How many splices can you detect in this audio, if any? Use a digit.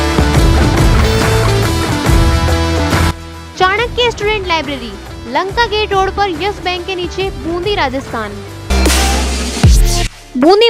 1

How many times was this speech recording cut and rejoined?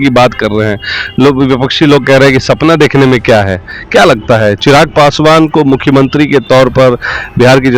0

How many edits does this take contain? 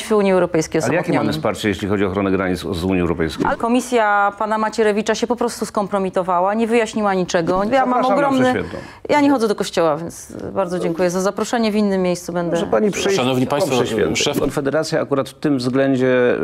3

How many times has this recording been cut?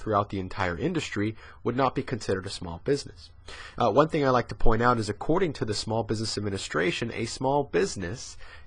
1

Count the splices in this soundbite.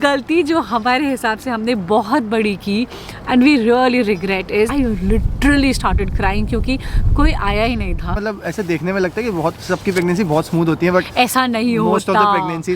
2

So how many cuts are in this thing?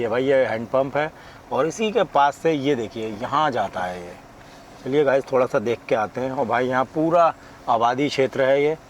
0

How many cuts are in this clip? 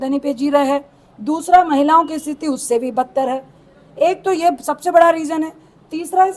0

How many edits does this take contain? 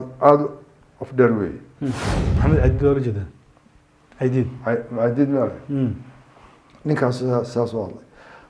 1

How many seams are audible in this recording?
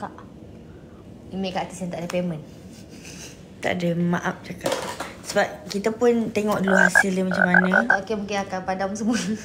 1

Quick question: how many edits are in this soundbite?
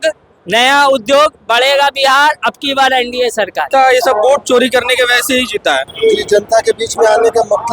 2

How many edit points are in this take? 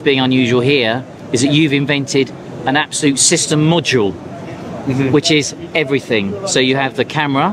0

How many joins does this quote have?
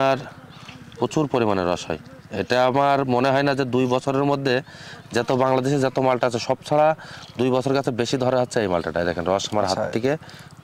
0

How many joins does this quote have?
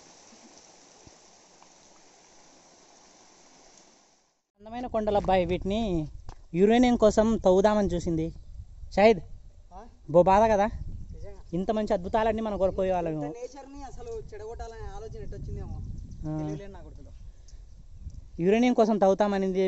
1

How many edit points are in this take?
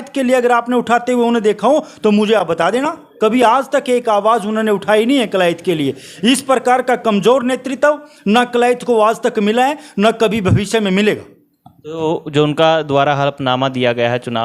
0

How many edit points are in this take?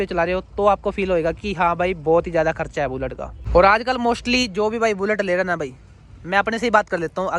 0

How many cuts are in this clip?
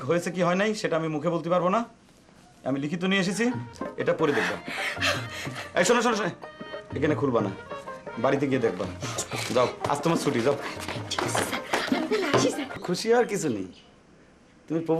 1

